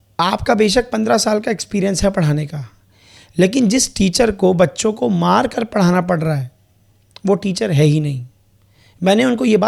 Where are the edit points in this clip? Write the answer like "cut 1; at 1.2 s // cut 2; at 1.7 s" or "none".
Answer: none